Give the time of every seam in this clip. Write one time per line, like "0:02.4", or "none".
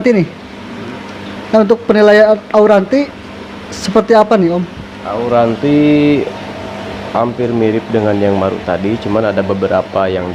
none